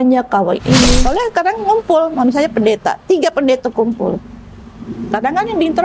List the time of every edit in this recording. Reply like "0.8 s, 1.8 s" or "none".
1.0 s